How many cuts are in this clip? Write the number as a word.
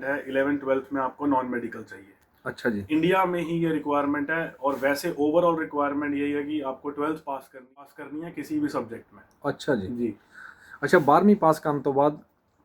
one